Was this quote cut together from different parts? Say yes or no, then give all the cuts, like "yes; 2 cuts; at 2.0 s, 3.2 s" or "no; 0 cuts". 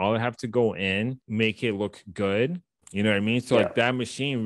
yes; 2 cuts; at 1.2 s, 2.7 s